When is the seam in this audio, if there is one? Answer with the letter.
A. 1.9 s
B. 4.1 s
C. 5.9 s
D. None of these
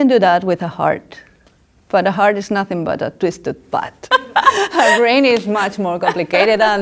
B